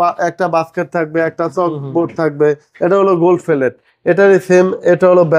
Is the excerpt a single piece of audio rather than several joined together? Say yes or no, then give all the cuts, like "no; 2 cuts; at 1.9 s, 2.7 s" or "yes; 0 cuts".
yes; 0 cuts